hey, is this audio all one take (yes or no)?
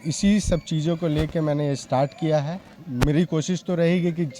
no